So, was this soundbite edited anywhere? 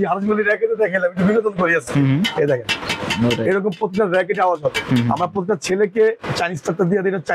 no; 0 cuts

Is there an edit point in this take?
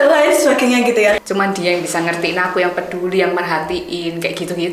yes; 1 cut; at 1.2 s

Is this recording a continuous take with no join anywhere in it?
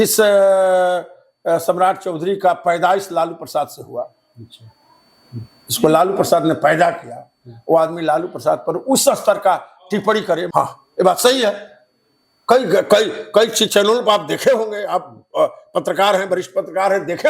no; 1 cut; at 10.5 s

